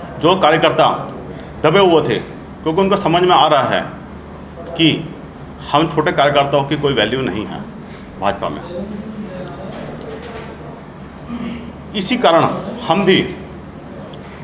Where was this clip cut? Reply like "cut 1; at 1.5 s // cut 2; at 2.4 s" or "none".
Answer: none

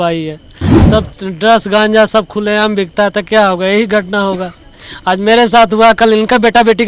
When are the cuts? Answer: none

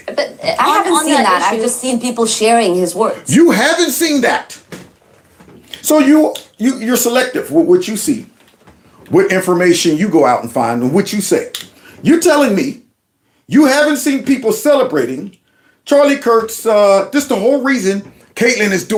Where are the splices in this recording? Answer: none

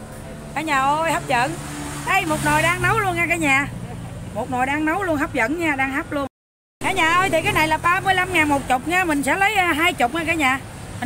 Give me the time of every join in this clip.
cut 1; at 6.5 s

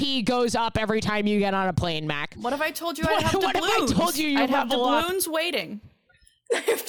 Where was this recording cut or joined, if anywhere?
none

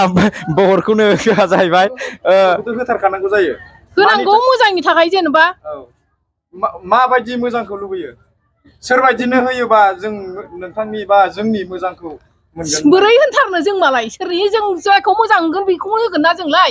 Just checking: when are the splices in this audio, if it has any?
cut 1; at 2.7 s

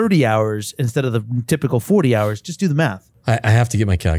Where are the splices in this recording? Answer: cut 1; at 3.1 s

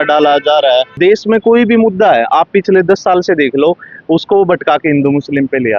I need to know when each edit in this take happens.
cut 1; at 1.0 s

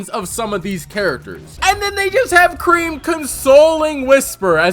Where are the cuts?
cut 1; at 1.5 s

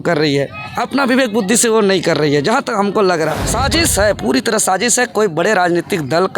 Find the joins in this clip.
cut 1; at 3.5 s

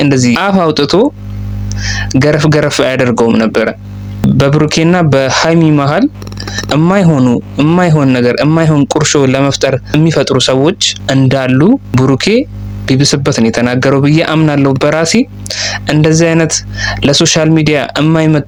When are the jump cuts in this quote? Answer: none

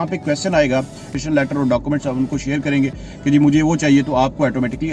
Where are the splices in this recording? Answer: cut 1; at 1.1 s

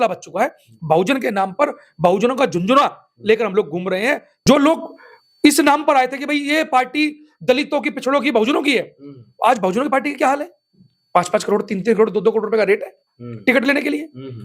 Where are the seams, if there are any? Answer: cut 1; at 4.3 s

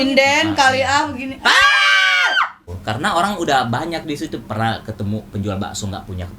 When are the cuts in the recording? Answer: cut 1; at 2.8 s

